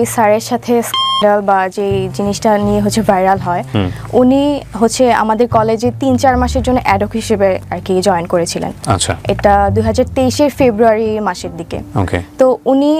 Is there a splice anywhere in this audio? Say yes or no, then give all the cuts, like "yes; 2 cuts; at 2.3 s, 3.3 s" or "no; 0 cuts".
no; 0 cuts